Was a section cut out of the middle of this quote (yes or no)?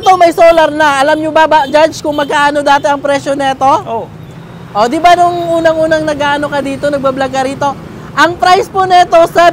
no